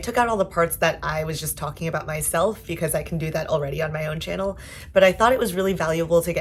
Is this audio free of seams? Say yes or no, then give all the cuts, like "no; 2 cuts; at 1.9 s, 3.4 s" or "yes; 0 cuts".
yes; 0 cuts